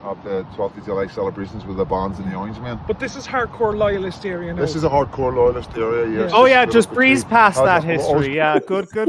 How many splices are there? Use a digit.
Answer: 0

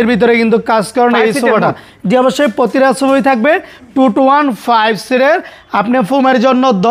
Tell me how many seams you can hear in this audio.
0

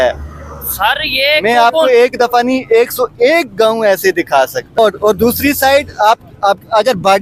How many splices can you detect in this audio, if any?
1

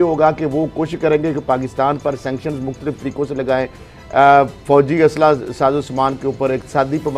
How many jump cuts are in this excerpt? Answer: 0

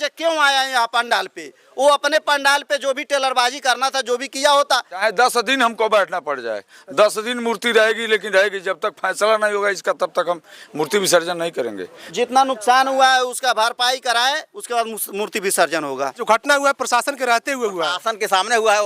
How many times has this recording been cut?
3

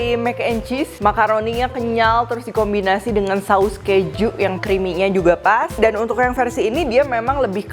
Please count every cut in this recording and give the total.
3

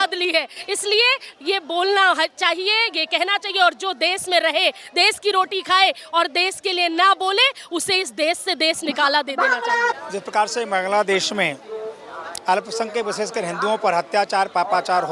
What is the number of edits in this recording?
1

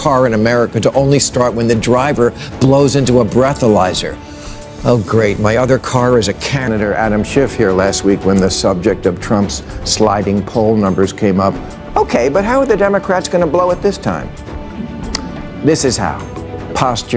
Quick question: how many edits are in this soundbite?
1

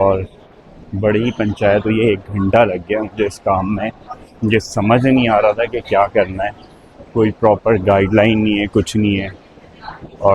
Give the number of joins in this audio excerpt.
0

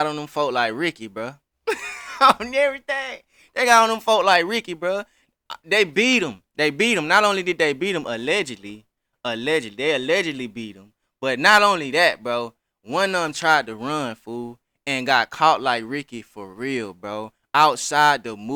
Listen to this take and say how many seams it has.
0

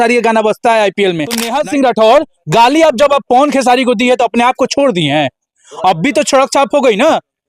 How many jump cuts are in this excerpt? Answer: 1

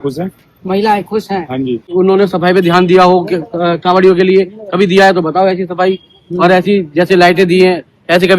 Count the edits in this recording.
1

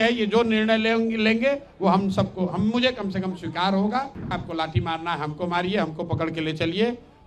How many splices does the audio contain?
1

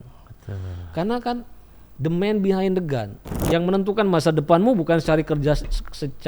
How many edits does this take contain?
1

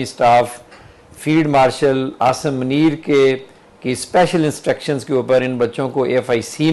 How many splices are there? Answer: 0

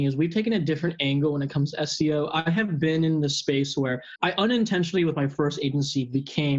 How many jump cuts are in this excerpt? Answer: 1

